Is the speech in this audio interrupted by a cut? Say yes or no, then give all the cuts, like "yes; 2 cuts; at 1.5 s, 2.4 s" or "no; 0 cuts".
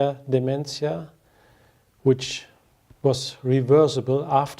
yes; 1 cut; at 1.1 s